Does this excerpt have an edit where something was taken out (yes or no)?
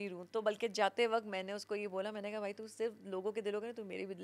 no